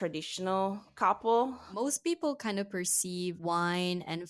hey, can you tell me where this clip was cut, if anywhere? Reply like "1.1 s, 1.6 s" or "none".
1.7 s, 3.4 s

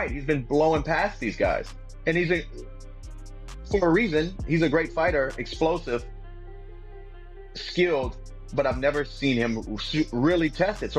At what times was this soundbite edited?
none

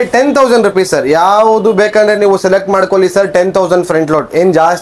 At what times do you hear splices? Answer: none

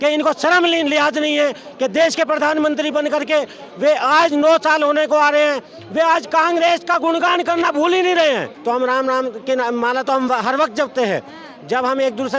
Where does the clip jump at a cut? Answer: 8.5 s

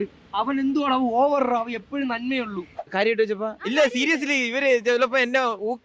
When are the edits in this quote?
2.8 s

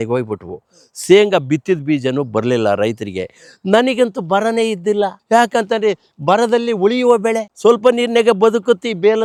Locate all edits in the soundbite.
none

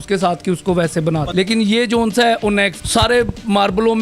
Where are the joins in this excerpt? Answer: 1.3 s, 2.8 s

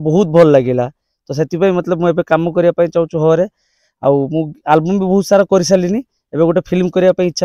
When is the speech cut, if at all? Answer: none

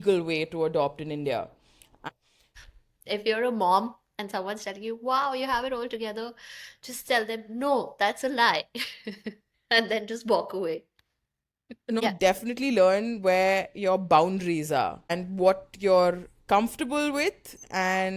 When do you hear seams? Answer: 2.4 s, 12.0 s, 15.2 s

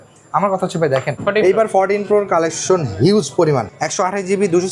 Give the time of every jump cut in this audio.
1.1 s, 3.8 s

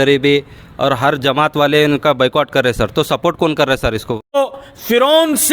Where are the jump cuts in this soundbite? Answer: 4.4 s

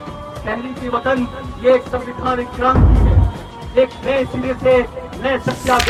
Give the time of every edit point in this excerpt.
none

